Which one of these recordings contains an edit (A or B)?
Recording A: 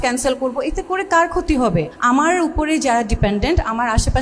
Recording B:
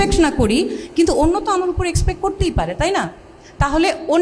A